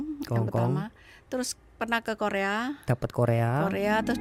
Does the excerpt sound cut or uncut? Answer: uncut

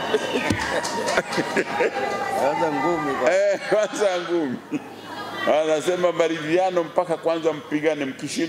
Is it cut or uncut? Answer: uncut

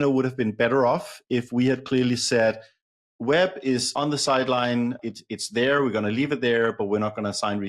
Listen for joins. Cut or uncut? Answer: cut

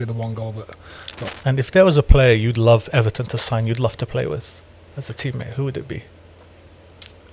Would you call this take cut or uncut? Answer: cut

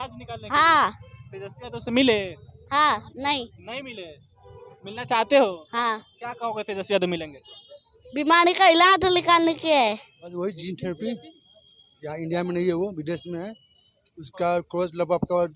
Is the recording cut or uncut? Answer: cut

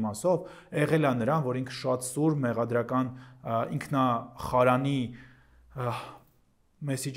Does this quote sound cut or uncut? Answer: uncut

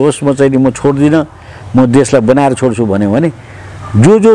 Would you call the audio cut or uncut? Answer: uncut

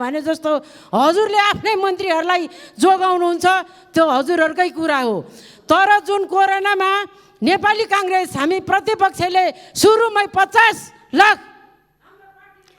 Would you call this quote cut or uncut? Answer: uncut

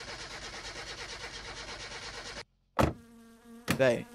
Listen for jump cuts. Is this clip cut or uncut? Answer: cut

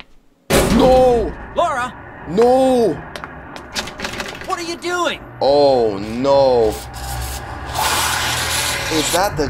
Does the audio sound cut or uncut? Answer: uncut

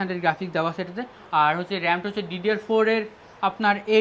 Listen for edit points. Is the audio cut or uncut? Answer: uncut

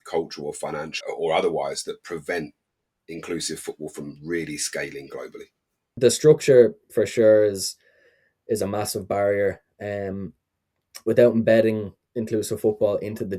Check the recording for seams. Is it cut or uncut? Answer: cut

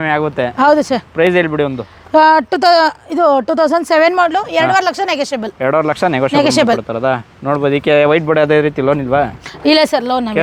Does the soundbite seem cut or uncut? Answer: uncut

